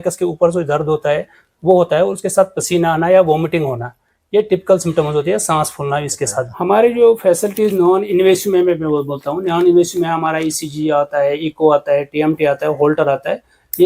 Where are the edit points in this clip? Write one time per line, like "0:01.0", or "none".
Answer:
0:06.4